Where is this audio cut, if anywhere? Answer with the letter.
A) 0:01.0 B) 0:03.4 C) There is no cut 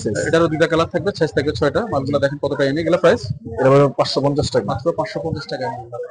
C